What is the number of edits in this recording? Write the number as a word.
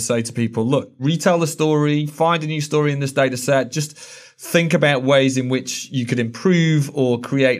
one